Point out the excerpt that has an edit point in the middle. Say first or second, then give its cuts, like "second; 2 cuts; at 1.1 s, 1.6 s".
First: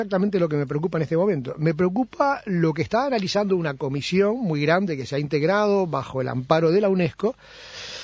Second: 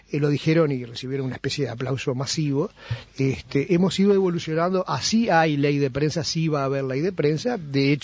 first; 1 cut; at 4.4 s